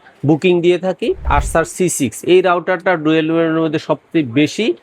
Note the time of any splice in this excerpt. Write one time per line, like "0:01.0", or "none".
0:01.2